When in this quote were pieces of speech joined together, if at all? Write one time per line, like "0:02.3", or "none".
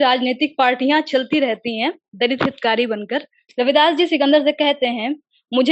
0:03.4